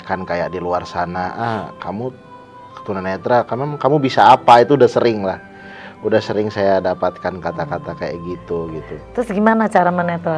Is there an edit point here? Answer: no; 0 cuts

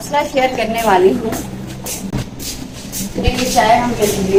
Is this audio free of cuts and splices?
yes; 0 cuts

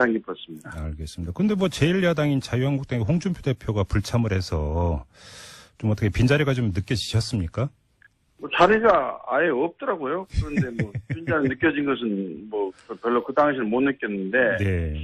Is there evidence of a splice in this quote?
no; 0 cuts

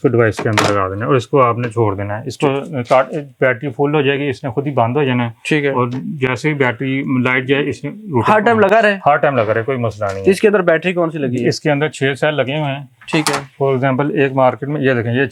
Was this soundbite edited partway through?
no; 0 cuts

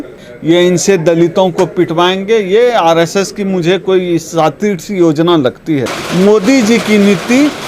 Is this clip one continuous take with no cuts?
no; 1 cut; at 6.0 s

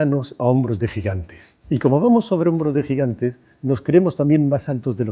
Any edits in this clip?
no; 0 cuts

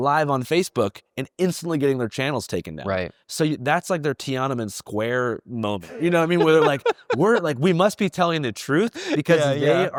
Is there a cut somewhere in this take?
no; 0 cuts

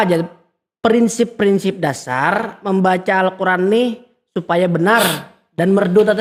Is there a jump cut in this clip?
no; 0 cuts

